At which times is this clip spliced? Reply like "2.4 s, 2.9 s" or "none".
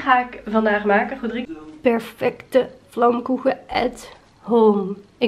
1.4 s